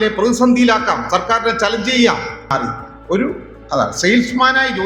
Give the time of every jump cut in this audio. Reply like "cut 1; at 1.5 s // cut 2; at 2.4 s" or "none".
cut 1; at 2.5 s

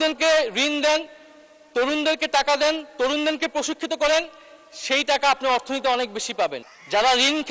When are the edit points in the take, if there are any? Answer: cut 1; at 6.6 s

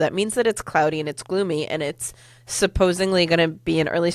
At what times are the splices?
none

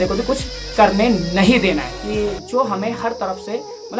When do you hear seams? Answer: cut 1; at 2.0 s

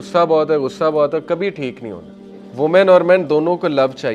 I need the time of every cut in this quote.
cut 1; at 2.4 s

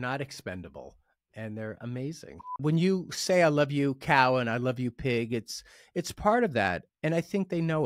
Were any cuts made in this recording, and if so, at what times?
cut 1; at 2.6 s // cut 2; at 6.9 s

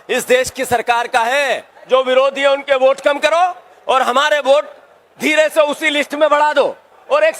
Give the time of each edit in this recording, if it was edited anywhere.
cut 1; at 1.7 s

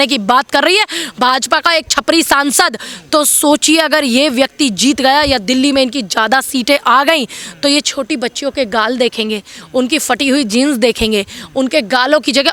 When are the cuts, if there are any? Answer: none

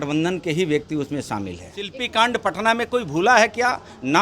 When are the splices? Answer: cut 1; at 2.0 s

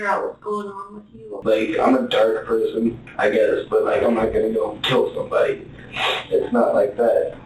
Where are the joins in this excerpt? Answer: cut 1; at 1.4 s

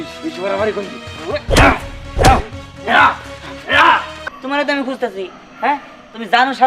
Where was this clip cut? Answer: cut 1; at 4.1 s

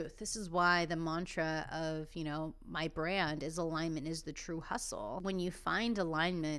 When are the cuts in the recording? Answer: cut 1; at 5.2 s

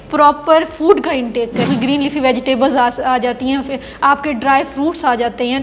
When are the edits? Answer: cut 1; at 1.7 s

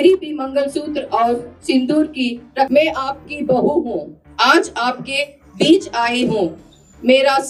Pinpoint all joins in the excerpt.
cut 1; at 2.7 s

